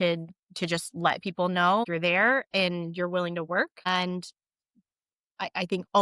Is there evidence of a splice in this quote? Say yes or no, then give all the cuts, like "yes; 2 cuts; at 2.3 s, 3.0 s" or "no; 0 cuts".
yes; 2 cuts; at 1.9 s, 3.9 s